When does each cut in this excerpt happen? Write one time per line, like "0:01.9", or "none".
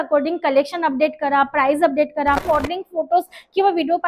0:02.4